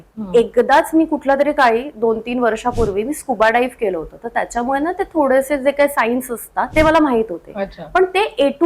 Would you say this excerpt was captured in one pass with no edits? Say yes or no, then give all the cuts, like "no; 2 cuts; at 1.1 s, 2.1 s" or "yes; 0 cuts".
no; 1 cut; at 6.6 s